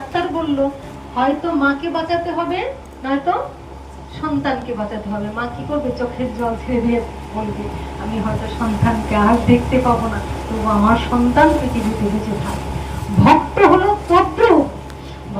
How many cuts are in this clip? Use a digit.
1